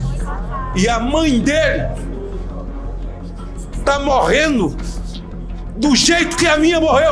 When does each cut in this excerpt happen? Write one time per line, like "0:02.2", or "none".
none